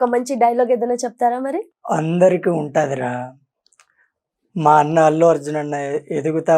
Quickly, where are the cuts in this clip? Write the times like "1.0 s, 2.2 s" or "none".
1.7 s